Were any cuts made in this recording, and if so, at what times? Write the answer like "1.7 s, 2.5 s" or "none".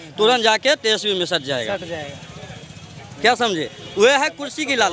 none

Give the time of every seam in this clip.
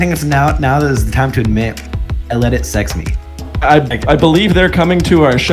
3.4 s

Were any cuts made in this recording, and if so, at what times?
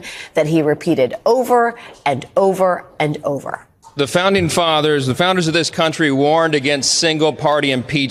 none

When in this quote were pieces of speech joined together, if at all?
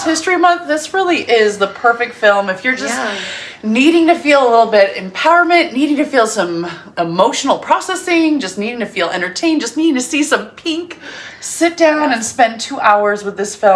none

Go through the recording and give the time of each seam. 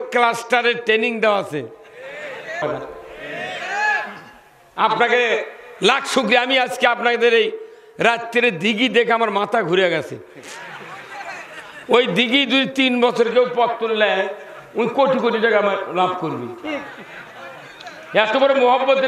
2.6 s

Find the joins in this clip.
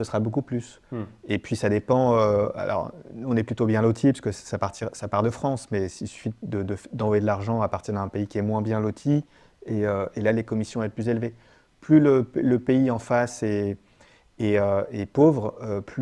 none

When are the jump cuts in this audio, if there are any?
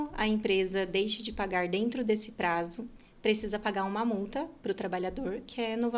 none

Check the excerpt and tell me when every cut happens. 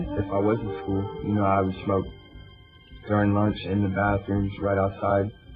none

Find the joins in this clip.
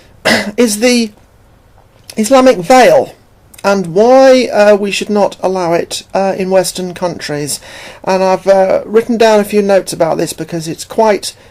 1.5 s

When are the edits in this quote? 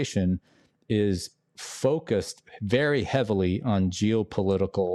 none

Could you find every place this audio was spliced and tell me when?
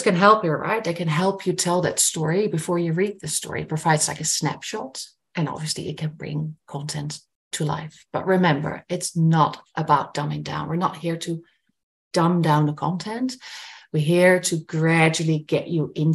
none

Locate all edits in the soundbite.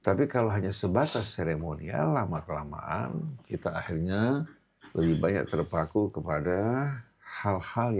none

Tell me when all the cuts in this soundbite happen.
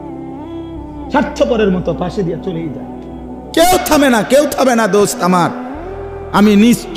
1.1 s

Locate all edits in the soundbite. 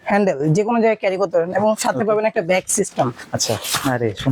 none

